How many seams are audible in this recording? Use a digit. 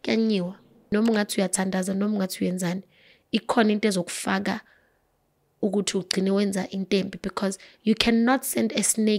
1